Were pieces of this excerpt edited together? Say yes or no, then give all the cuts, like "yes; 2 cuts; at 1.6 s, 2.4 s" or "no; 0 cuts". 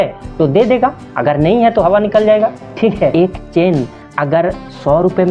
yes; 1 cut; at 3.1 s